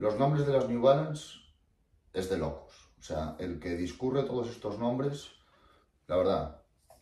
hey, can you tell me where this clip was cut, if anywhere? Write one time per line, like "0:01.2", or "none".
none